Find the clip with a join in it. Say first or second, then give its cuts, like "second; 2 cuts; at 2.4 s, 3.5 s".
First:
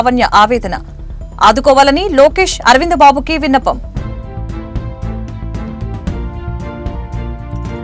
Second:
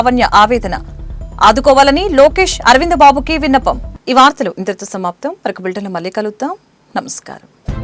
first; 1 cut; at 3.9 s